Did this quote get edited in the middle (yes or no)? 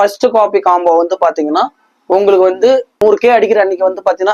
yes